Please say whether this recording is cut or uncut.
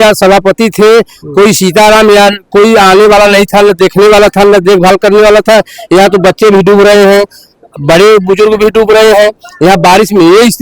uncut